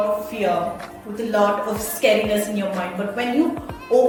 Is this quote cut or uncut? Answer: uncut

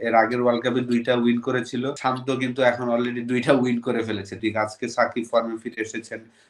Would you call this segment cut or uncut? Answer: cut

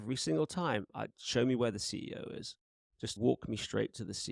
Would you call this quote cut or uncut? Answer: cut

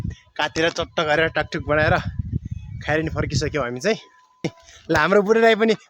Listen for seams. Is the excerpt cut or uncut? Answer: cut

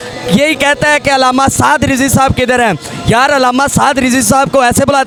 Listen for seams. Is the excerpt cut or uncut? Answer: uncut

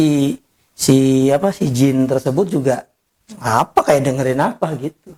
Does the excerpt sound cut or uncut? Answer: uncut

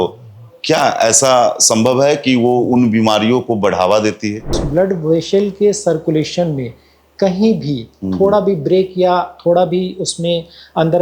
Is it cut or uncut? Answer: cut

